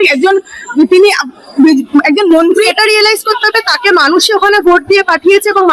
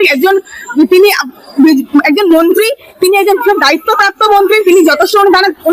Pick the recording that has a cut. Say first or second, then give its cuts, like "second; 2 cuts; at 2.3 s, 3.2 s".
first; 1 cut; at 2.7 s